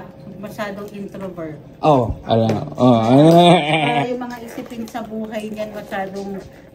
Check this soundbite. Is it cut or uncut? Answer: uncut